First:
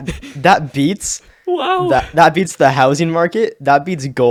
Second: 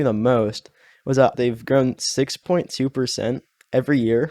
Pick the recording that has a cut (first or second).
second